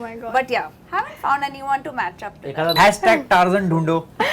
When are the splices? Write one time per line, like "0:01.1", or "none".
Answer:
0:02.7